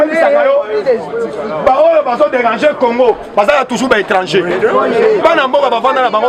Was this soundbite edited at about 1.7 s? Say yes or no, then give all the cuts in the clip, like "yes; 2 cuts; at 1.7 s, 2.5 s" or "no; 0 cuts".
no; 0 cuts